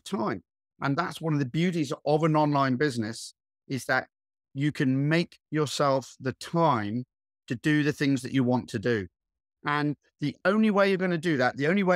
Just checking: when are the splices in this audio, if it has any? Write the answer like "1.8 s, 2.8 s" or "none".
none